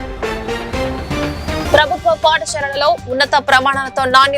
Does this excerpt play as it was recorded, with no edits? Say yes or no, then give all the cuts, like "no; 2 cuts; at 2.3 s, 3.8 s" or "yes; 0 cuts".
no; 1 cut; at 1.5 s